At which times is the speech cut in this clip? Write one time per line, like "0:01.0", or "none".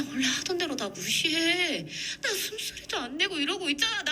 none